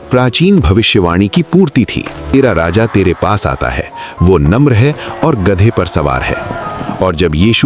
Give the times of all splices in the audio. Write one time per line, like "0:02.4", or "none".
0:02.3